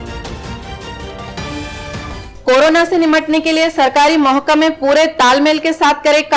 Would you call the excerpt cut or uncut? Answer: cut